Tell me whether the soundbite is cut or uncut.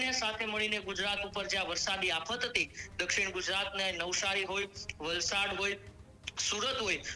uncut